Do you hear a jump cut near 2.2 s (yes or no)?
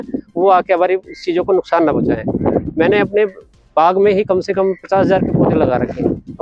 no